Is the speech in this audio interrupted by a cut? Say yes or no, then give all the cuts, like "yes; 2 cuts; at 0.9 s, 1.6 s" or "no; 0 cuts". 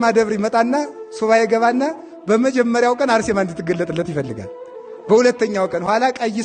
no; 0 cuts